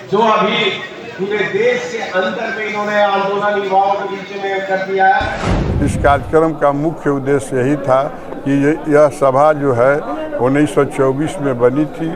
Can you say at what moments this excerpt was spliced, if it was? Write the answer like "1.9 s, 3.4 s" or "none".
5.6 s